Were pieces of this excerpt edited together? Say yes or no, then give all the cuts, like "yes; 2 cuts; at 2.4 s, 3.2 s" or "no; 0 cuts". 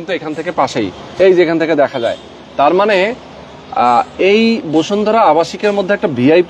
no; 0 cuts